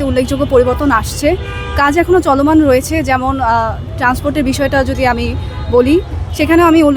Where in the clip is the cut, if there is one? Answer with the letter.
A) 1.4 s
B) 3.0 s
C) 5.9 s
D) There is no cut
D